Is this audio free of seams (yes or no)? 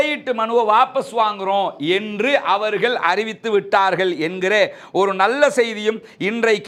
yes